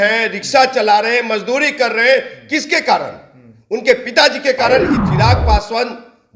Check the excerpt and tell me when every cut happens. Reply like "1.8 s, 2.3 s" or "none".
5.0 s